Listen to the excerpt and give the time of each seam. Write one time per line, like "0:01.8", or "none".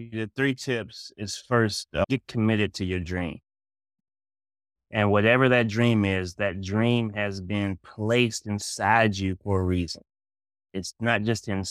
none